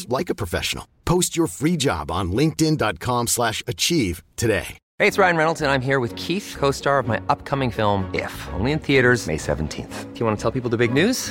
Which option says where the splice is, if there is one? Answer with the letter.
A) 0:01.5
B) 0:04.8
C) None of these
B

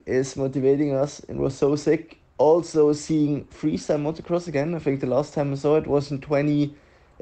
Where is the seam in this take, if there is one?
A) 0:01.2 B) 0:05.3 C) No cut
C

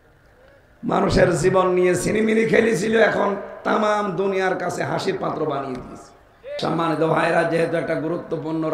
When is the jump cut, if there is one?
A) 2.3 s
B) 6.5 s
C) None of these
B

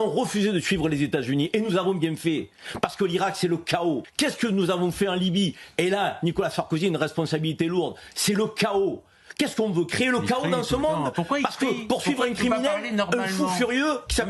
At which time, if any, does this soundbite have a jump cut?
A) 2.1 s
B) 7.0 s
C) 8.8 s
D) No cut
D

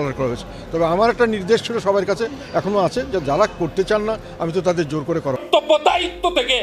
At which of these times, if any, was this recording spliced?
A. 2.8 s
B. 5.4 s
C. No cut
B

